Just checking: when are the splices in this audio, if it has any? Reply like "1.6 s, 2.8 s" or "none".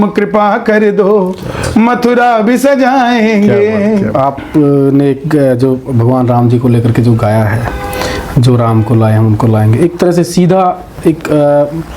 4.1 s